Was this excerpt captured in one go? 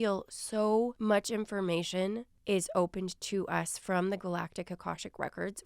no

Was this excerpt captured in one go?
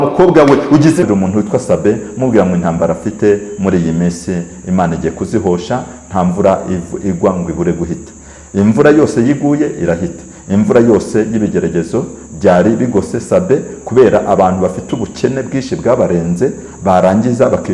no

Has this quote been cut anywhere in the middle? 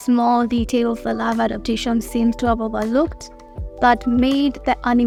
no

